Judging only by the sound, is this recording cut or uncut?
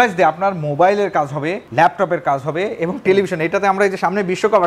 cut